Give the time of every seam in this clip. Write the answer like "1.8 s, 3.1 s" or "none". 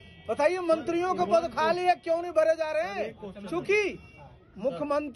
none

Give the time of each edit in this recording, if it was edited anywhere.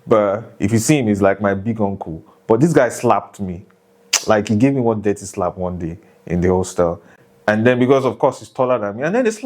7.1 s

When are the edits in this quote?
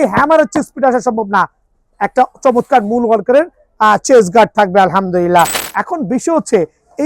5.6 s

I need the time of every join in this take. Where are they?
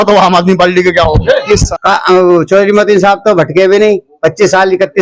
1.7 s

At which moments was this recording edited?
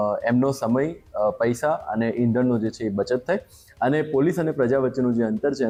none

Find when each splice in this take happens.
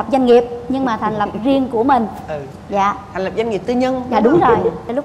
none

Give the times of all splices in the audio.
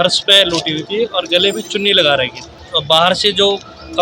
2.6 s

